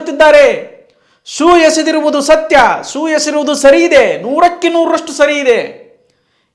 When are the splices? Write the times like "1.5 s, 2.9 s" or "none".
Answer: none